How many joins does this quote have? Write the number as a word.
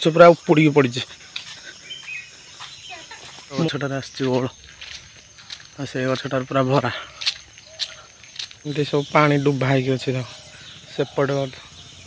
two